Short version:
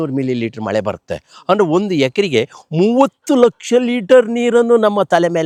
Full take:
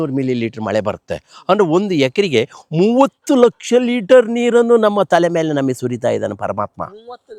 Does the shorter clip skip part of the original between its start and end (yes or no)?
no